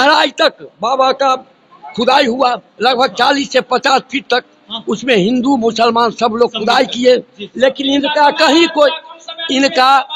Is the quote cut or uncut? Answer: uncut